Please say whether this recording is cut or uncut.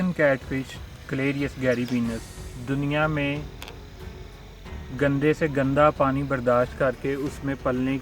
uncut